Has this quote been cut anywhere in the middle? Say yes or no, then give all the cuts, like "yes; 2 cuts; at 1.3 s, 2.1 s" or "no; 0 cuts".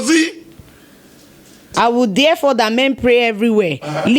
yes; 1 cut; at 1.7 s